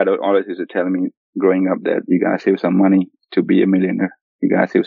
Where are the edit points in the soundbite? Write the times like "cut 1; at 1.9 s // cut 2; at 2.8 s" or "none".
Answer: none